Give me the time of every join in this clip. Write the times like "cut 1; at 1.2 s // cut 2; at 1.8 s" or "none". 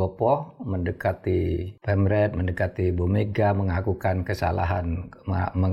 cut 1; at 1.7 s